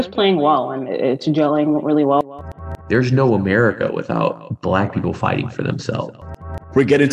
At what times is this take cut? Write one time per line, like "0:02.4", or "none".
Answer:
0:02.3
0:04.5
0:06.4